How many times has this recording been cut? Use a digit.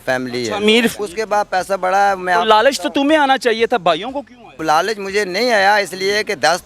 2